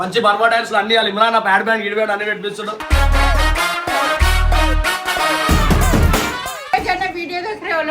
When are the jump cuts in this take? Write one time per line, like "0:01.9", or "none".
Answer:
0:06.6